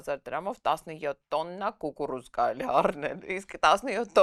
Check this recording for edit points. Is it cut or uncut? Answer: uncut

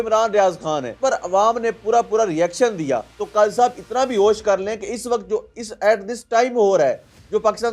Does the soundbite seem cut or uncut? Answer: cut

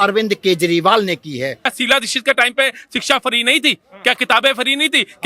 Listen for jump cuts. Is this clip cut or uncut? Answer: cut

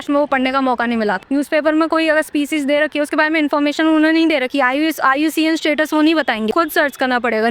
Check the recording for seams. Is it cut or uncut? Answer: cut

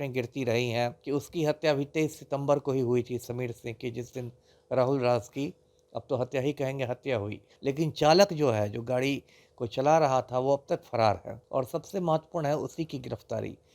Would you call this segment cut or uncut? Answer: cut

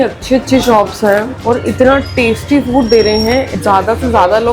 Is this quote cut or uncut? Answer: cut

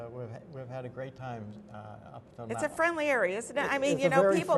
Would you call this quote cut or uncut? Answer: cut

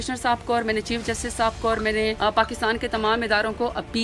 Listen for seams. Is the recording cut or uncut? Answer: cut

